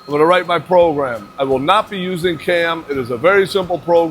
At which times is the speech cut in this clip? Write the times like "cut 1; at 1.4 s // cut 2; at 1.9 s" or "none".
none